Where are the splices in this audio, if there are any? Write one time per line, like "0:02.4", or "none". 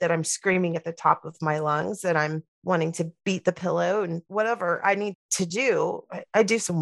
0:03.2
0:05.3

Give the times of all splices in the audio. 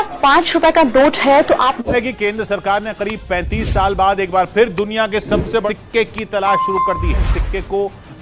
0:01.8

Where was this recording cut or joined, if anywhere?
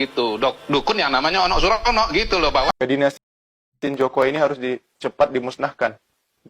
0:02.8

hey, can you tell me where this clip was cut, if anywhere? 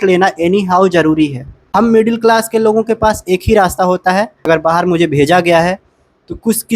0:01.6
0:04.4

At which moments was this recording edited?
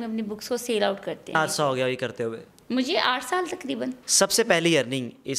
0:01.3
0:04.0

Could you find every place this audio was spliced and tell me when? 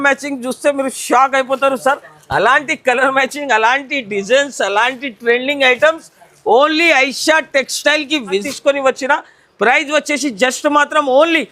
0:08.5

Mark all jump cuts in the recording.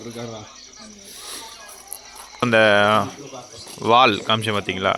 0:02.4

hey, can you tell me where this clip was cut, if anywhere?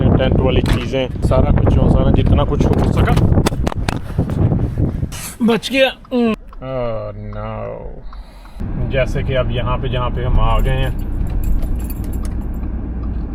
0:01.2
0:05.2
0:06.3
0:08.6

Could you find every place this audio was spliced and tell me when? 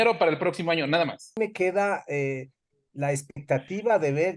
0:01.4

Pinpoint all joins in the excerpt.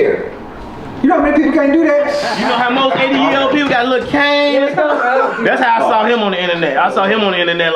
0:02.3

